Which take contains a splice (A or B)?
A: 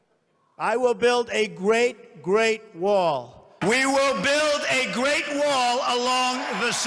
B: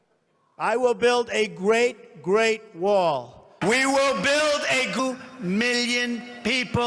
A